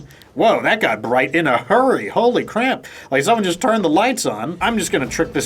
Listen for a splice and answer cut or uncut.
cut